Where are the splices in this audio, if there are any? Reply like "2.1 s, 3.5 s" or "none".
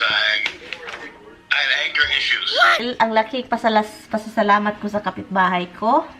2.8 s